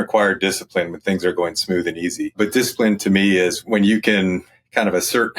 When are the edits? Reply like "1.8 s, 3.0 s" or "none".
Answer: 2.3 s, 3.6 s